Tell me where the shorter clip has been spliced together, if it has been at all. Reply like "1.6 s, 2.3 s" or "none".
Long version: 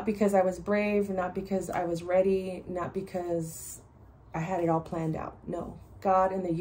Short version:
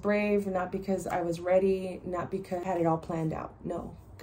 2.6 s